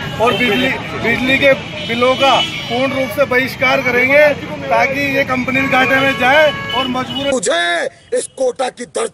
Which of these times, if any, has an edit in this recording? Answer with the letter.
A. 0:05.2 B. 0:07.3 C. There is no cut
B